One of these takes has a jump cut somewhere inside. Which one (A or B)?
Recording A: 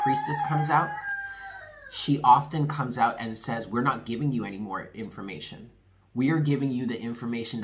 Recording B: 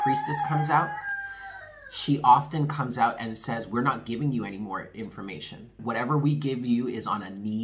B